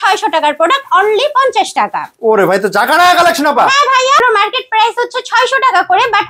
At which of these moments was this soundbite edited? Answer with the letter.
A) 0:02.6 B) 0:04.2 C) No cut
B